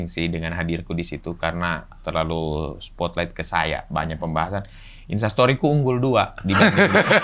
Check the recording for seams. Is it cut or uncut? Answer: uncut